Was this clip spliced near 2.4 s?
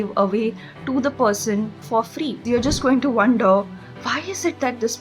yes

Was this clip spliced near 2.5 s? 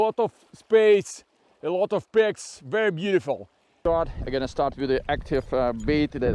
no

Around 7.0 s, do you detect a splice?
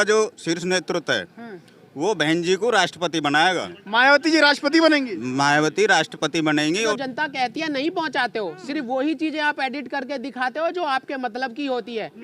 yes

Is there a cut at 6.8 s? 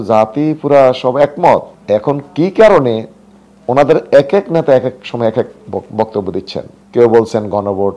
yes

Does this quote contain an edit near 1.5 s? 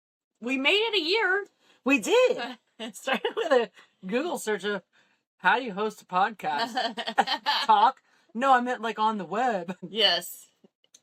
no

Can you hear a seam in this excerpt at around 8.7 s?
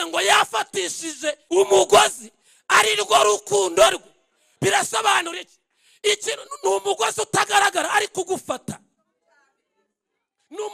no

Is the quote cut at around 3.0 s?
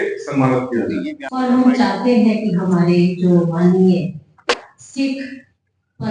no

